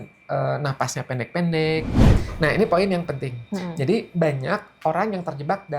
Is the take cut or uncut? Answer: cut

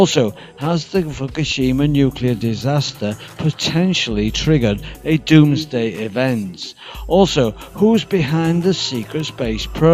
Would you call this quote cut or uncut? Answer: cut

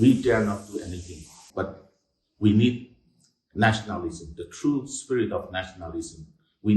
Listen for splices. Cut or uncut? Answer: cut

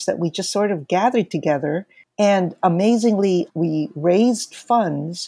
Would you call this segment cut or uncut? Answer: cut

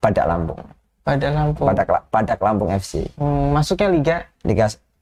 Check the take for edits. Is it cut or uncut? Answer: uncut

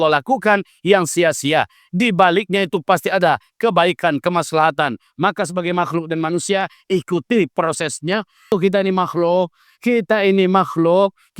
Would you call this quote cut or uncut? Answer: cut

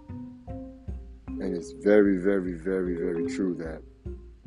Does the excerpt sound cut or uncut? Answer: uncut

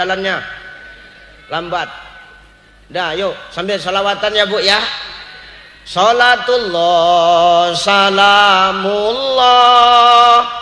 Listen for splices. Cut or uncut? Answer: uncut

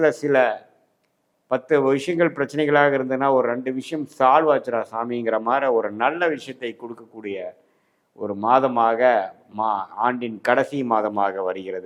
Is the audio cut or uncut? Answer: uncut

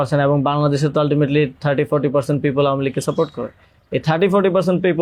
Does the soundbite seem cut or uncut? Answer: uncut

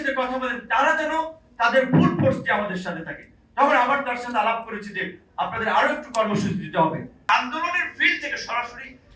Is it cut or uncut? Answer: cut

